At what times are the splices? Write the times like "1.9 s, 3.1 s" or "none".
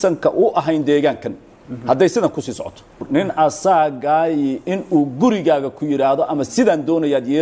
3.0 s